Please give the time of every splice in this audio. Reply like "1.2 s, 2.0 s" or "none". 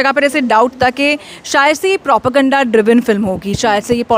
none